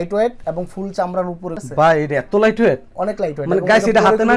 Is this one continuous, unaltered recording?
no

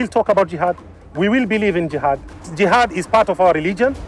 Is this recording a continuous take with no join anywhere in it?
no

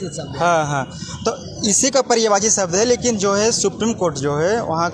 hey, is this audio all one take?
yes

